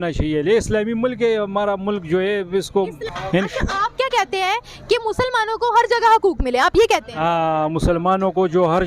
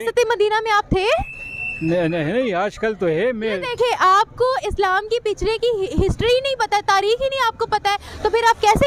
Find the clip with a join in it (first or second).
first